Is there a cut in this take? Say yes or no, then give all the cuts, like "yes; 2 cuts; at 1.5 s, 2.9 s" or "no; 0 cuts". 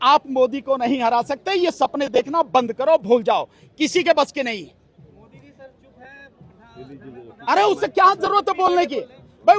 no; 0 cuts